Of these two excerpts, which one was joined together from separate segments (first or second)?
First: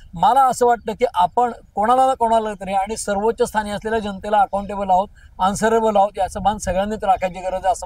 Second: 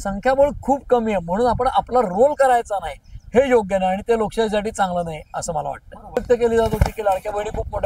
second